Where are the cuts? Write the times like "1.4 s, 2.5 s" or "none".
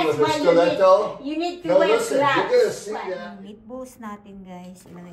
3.2 s